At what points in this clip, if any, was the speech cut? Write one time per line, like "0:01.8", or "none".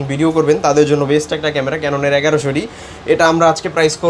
none